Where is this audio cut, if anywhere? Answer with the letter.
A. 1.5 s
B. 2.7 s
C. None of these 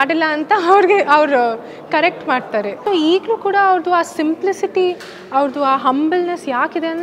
B